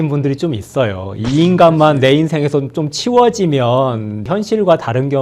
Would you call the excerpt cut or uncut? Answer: cut